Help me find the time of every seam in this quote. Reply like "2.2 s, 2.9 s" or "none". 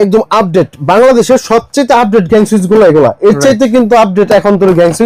none